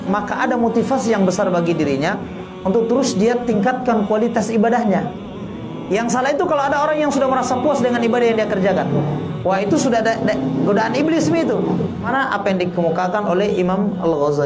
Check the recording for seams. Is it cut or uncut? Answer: cut